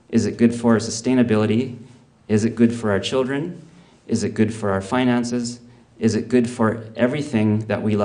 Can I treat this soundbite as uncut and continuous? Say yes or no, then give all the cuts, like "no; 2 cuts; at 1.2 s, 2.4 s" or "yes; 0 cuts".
yes; 0 cuts